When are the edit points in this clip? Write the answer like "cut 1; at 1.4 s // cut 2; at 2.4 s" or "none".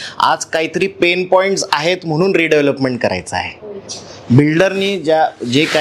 cut 1; at 3.9 s